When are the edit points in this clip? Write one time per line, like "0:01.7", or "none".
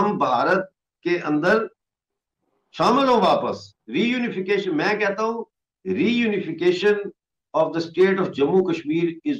none